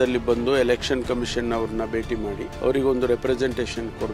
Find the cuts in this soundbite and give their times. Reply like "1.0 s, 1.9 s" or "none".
2.5 s